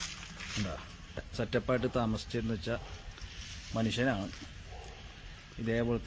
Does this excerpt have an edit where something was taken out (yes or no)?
yes